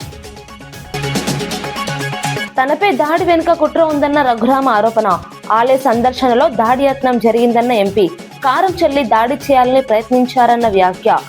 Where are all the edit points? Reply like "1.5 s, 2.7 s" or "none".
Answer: 0.9 s, 2.4 s